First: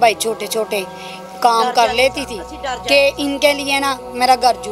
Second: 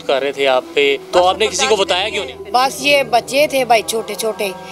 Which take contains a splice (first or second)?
second